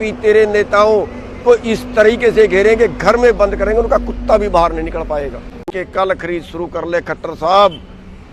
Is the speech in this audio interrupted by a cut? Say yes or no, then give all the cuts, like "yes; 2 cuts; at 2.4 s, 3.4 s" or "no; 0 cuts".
yes; 1 cut; at 5.7 s